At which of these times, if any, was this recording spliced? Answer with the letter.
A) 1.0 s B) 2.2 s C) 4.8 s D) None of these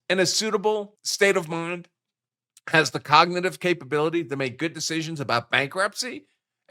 A